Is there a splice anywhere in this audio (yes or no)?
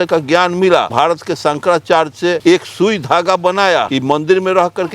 yes